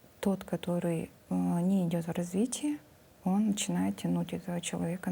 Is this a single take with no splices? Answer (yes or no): yes